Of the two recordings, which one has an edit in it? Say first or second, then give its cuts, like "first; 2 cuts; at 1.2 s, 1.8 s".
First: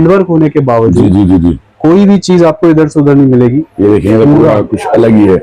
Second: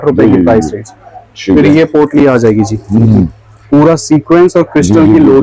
first; 1 cut; at 3.7 s